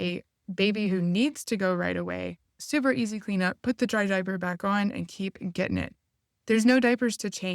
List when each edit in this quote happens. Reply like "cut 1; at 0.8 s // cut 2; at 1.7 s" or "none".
cut 1; at 2.6 s